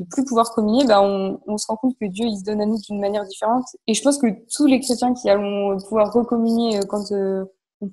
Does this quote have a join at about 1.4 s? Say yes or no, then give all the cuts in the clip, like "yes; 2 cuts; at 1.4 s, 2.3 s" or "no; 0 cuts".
no; 1 cut; at 3.7 s